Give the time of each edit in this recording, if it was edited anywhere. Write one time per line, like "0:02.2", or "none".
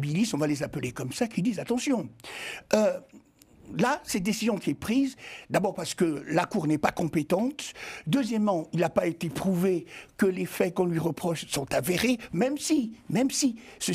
none